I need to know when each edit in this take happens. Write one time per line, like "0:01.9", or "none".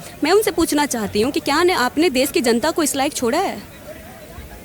none